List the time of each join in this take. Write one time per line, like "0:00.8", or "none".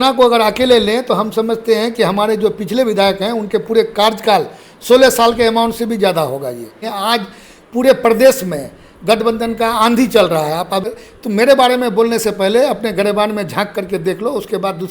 0:06.9
0:10.9